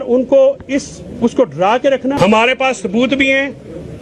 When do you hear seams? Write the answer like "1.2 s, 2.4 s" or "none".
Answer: 2.2 s